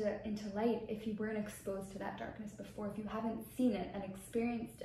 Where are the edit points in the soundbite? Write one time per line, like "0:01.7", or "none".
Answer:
none